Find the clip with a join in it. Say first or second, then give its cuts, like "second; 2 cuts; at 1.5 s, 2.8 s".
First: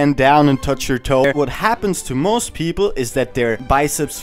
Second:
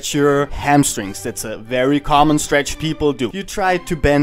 first; 1 cut; at 1.2 s